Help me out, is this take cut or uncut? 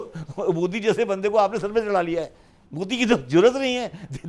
uncut